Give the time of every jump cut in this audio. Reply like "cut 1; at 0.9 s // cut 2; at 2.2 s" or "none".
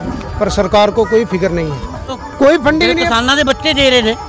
cut 1; at 2.2 s